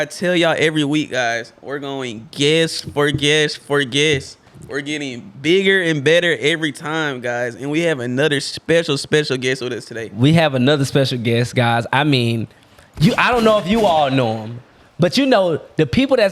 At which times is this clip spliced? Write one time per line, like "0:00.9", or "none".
none